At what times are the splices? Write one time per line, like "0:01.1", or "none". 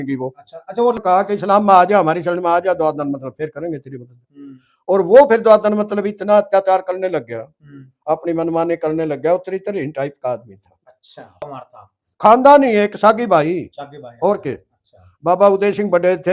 0:01.0
0:11.4

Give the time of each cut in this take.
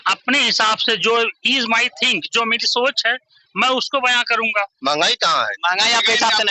0:04.7

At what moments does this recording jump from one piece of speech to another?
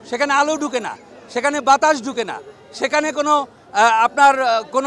none

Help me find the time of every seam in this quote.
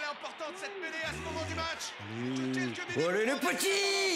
none

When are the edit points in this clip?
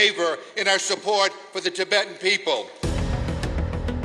0:02.7

